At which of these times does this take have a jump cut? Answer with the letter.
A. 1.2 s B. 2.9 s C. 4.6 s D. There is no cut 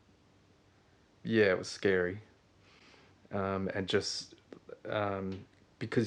D